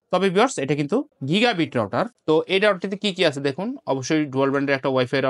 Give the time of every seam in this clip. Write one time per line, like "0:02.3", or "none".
none